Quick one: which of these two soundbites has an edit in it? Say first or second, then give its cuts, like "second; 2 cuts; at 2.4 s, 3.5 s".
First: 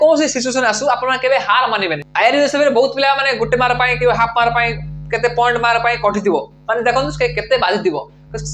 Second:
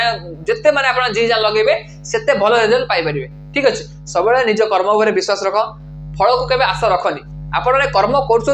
first; 1 cut; at 2.0 s